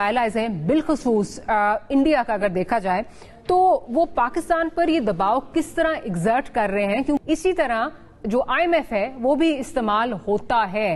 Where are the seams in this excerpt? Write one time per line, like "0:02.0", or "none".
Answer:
none